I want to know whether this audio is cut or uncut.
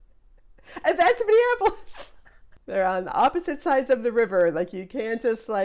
cut